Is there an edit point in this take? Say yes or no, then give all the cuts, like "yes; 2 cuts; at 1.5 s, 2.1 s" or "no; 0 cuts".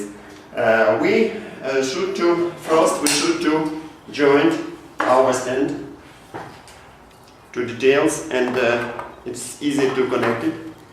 yes; 1 cut; at 3.7 s